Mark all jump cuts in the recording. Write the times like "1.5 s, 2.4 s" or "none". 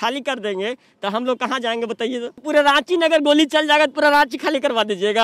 2.4 s